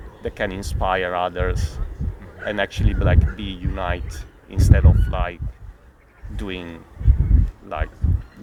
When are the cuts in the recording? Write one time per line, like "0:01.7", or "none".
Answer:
none